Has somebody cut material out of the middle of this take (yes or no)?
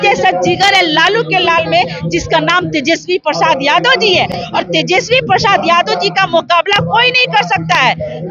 no